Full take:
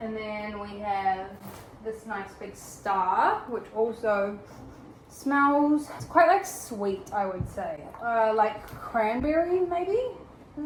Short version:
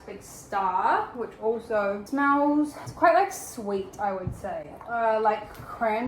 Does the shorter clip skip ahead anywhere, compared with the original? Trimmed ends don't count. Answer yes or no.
yes